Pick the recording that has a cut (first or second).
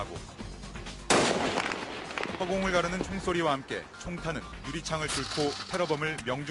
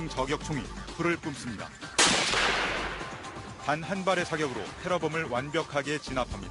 second